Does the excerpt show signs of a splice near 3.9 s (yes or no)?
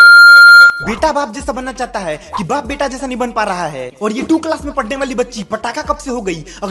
yes